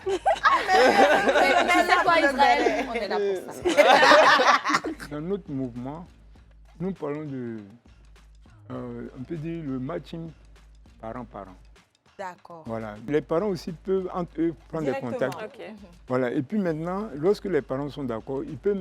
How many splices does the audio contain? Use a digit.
2